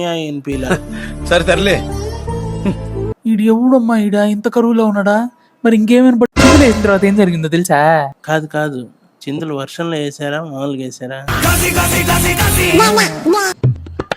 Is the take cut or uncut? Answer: cut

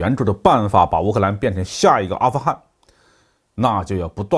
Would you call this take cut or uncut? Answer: uncut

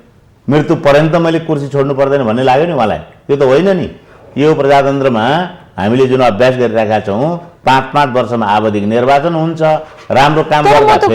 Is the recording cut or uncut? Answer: uncut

